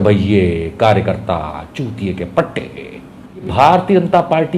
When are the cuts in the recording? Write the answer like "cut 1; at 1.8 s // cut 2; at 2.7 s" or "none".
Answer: cut 1; at 3.5 s